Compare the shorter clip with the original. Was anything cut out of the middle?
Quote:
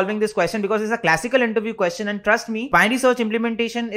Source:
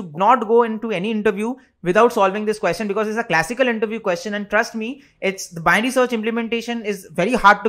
yes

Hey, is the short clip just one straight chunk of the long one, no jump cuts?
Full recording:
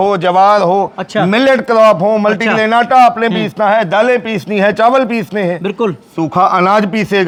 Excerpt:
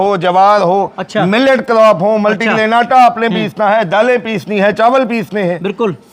yes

